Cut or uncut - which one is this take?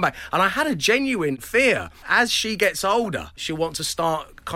cut